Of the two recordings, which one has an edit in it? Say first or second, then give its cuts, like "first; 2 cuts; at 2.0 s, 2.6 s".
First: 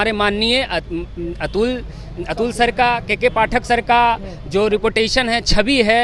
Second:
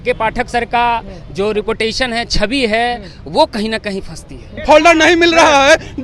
second; 1 cut; at 4.6 s